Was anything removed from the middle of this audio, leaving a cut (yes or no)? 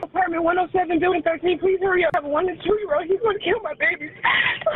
yes